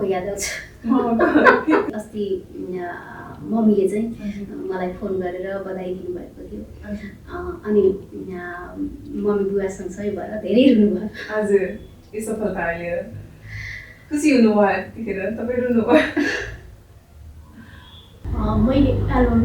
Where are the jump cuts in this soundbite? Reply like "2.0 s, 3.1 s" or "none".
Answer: 1.9 s, 18.2 s